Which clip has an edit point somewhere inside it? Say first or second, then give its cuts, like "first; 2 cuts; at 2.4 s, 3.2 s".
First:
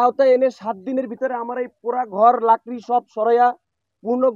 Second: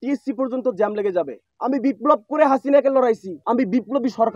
second; 2 cuts; at 1.4 s, 3.3 s